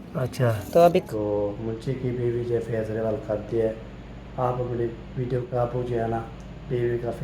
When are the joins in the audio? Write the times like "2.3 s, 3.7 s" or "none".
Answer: 1.1 s, 5.5 s